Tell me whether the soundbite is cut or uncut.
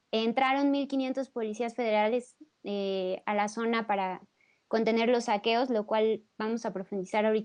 cut